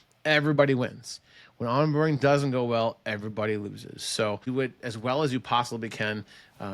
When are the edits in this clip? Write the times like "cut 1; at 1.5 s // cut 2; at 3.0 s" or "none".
cut 1; at 4.4 s